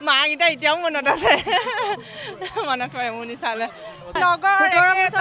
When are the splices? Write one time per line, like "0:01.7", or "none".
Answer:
0:04.2